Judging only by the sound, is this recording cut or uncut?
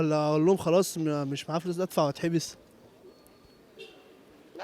uncut